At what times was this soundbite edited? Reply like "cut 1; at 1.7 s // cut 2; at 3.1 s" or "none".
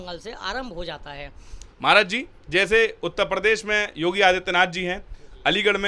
cut 1; at 1.6 s